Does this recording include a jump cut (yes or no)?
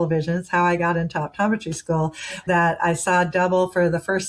yes